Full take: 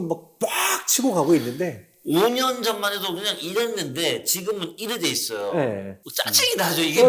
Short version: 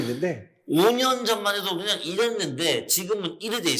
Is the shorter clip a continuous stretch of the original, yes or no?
yes